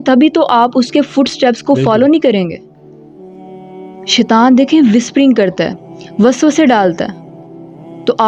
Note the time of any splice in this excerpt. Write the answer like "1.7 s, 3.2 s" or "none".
none